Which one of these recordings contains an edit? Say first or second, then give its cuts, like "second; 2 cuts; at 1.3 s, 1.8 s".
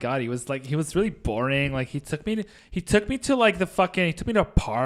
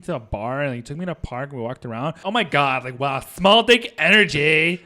second; 1 cut; at 2.2 s